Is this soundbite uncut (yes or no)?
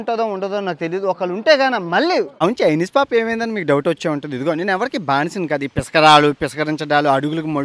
no